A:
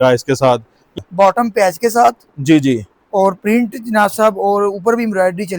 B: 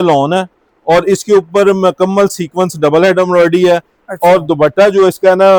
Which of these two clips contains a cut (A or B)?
A